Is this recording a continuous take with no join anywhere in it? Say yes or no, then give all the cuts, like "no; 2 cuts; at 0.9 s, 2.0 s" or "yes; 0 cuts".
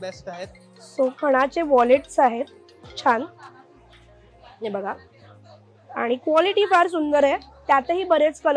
yes; 0 cuts